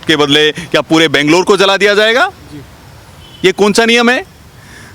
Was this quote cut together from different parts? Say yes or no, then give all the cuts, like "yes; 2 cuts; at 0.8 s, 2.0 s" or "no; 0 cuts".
no; 0 cuts